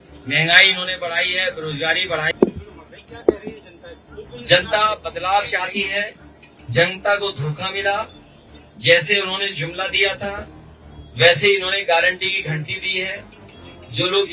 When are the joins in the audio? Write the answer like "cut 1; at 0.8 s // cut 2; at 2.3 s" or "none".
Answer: cut 1; at 2.3 s